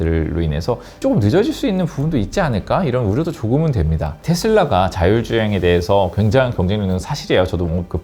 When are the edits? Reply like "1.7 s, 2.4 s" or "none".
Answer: 4.1 s